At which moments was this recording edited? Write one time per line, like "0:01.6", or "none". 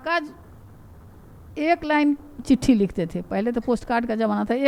none